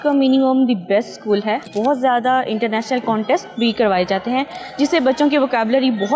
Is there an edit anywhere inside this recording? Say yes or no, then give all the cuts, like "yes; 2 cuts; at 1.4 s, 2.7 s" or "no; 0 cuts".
yes; 1 cut; at 1.6 s